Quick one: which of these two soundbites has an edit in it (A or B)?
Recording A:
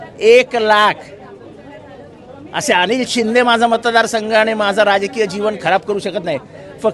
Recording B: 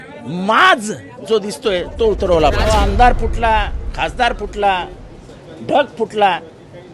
B